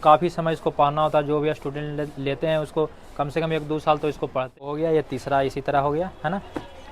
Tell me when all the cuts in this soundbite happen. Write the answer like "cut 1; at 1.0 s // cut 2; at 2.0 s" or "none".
cut 1; at 4.7 s